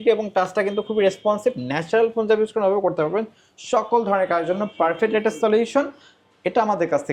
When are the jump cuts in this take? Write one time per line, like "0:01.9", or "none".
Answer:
none